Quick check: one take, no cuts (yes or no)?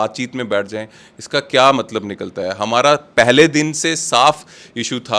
yes